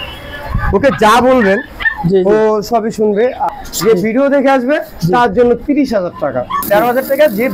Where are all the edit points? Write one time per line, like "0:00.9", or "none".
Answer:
0:03.5
0:06.5